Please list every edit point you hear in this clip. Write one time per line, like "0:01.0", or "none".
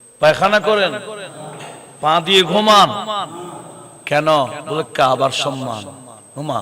0:04.6